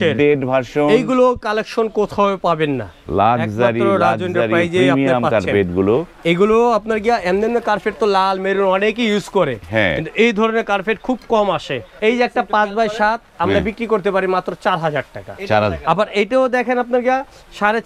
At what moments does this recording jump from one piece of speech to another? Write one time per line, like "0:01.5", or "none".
0:11.9